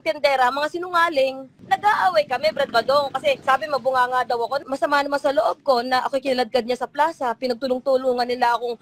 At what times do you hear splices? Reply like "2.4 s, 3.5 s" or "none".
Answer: 1.5 s, 3.4 s, 4.6 s